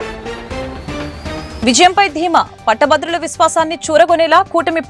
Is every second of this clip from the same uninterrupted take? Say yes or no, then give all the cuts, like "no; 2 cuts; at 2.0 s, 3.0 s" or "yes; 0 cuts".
yes; 0 cuts